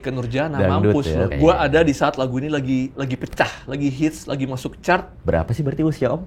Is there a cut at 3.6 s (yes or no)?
no